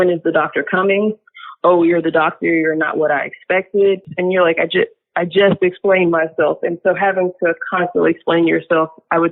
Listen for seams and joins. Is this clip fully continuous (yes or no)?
no